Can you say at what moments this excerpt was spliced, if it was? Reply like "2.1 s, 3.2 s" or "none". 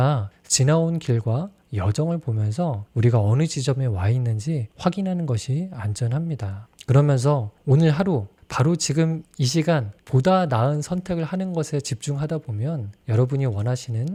none